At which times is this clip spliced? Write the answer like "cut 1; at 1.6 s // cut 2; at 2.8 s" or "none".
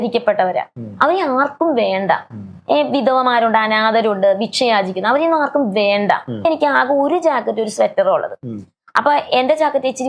cut 1; at 6.4 s